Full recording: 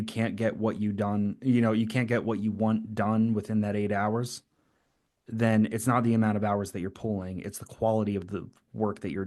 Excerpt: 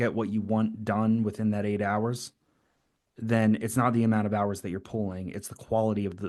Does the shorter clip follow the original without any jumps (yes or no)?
yes